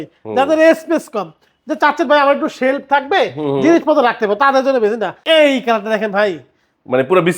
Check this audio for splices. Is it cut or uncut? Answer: cut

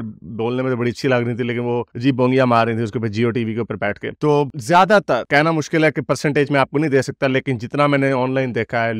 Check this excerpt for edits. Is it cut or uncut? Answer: uncut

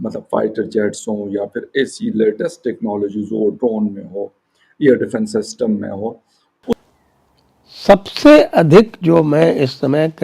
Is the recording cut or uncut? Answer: cut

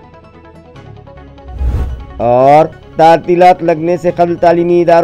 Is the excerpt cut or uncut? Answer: cut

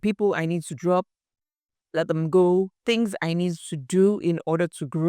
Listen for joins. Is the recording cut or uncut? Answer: cut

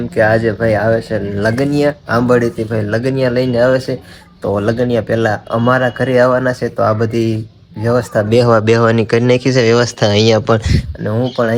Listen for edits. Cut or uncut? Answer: uncut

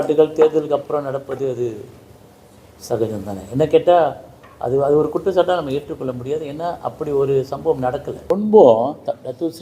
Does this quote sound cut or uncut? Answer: cut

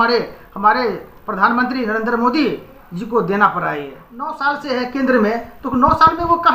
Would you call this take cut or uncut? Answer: cut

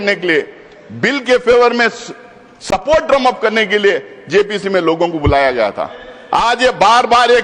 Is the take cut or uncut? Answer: uncut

